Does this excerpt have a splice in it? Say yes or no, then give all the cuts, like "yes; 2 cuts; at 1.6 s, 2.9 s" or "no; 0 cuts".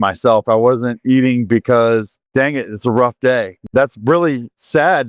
yes; 2 cuts; at 2.2 s, 3.6 s